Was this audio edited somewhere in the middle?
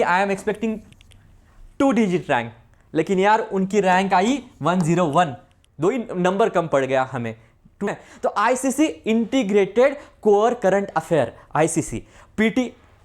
yes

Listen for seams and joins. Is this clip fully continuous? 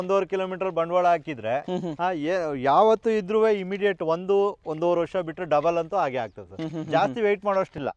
yes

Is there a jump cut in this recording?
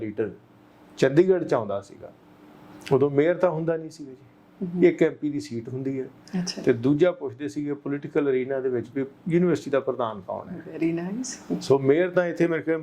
no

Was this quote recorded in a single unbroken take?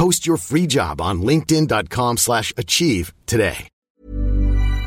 no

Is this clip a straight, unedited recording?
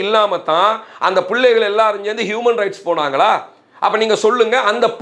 yes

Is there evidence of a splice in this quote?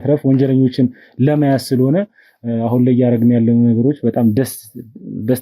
no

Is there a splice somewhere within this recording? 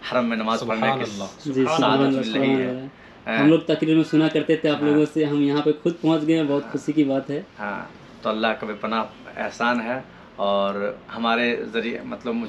no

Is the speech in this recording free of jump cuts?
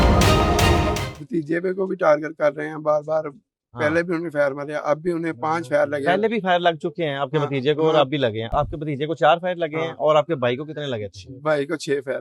no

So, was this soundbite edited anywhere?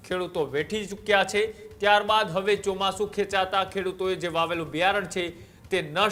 no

